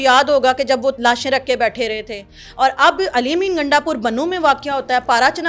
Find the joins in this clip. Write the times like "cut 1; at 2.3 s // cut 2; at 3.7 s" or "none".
none